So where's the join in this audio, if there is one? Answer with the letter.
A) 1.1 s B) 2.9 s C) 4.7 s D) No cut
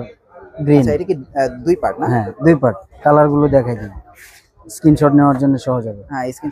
B